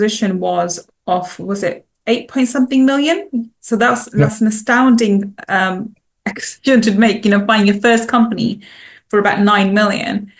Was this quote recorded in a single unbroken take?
yes; 0 cuts

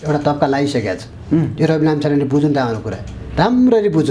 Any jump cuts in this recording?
no; 0 cuts

